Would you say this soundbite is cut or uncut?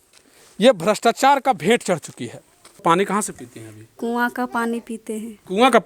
cut